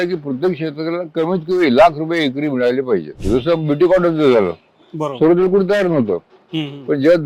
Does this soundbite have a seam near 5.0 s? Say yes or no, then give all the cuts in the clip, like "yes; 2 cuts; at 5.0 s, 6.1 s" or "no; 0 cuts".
no; 1 cut; at 3.2 s